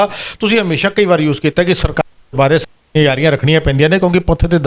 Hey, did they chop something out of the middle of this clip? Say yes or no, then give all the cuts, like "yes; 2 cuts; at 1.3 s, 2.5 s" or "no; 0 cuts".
no; 0 cuts